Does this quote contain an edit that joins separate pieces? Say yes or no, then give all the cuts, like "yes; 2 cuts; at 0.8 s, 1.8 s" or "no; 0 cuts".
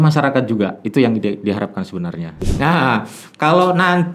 yes; 1 cut; at 2.4 s